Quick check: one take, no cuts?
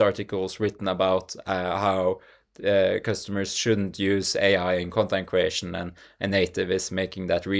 yes; 0 cuts

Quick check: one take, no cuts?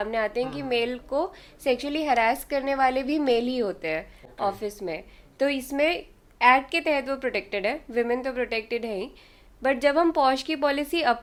yes; 0 cuts

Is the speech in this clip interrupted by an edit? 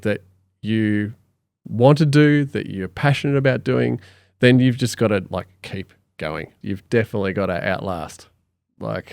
yes; 1 cut; at 6.5 s

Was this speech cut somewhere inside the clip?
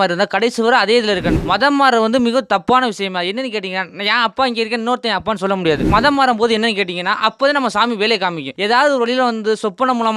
yes; 3 cuts; at 1.3 s, 5.8 s, 8.5 s

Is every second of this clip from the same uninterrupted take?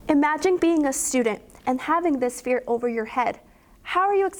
yes; 0 cuts

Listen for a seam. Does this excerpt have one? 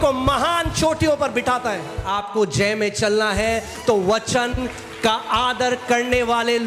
yes; 1 cut; at 2.3 s

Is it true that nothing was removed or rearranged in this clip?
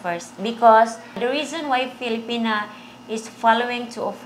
no; 1 cut; at 1.2 s

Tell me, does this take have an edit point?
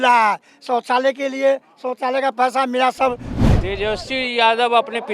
yes; 1 cut; at 3.5 s

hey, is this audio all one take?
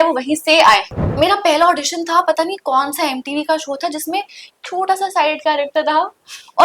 no; 1 cut; at 1.0 s

